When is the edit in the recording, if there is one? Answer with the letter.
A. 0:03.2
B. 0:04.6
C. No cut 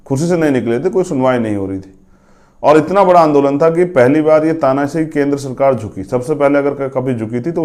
C